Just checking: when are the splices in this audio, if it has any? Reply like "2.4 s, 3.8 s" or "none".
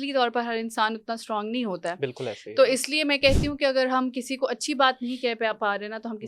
none